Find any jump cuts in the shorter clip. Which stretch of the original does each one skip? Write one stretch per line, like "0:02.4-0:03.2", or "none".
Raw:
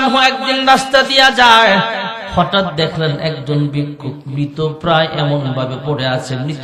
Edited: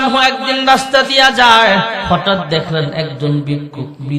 0:02.0-0:02.3